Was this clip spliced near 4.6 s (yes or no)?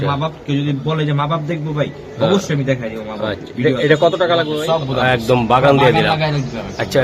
yes